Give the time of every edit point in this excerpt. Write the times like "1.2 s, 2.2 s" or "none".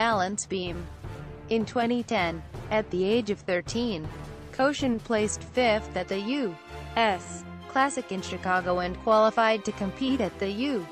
9.4 s